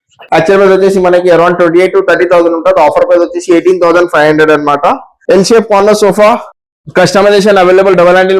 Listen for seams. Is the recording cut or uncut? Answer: cut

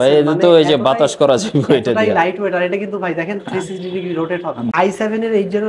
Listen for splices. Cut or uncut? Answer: cut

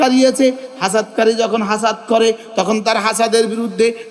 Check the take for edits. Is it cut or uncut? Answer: uncut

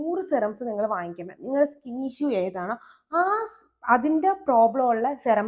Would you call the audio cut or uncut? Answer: uncut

